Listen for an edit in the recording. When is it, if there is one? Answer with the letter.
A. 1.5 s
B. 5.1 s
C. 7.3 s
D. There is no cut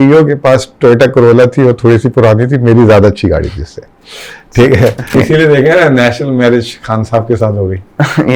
B